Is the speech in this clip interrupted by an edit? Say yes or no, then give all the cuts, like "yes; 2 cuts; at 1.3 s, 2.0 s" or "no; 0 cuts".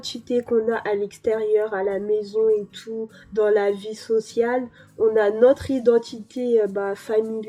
no; 0 cuts